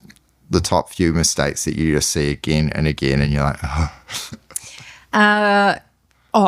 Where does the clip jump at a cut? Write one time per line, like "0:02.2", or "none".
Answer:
none